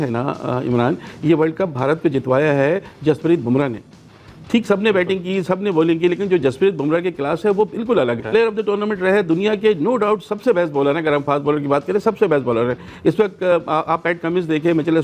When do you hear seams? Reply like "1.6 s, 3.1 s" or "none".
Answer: 8.2 s